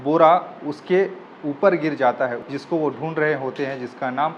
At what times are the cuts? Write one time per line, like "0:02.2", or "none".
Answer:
0:02.5